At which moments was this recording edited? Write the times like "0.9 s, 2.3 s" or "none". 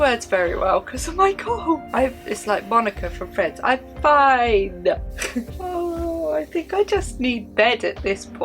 1.9 s, 5.6 s